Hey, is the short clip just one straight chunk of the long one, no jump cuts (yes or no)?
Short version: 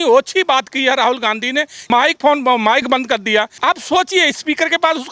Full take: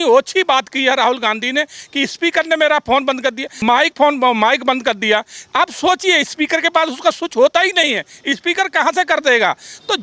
no